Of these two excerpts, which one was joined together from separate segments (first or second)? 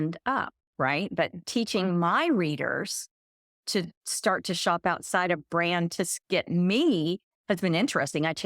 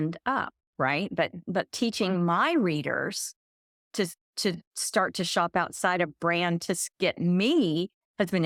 first